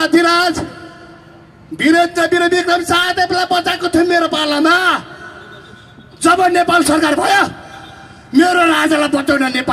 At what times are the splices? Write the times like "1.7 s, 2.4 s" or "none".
none